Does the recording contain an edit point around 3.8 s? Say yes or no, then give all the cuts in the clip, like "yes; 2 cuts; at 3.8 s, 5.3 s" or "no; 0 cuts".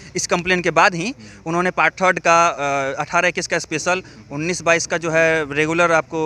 no; 0 cuts